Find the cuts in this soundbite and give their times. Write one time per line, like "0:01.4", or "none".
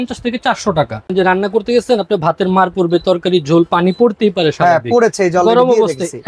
0:01.1